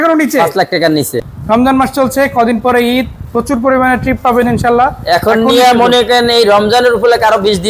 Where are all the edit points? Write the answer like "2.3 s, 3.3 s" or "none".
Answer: 1.2 s